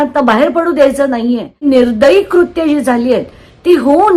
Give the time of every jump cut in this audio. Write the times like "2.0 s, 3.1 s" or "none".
1.6 s